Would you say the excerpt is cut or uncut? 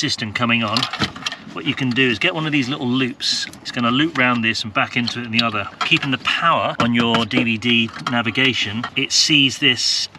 cut